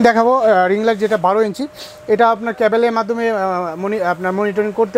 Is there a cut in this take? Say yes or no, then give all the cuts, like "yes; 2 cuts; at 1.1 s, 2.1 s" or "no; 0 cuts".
no; 0 cuts